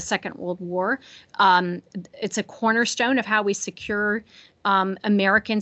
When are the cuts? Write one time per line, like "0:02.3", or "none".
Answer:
none